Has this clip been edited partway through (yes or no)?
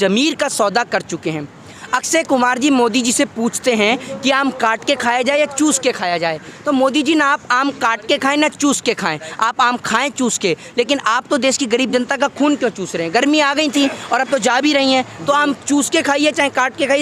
no